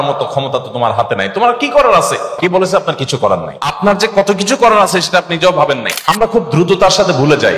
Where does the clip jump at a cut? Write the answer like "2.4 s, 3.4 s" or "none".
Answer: 2.3 s, 3.8 s, 6.2 s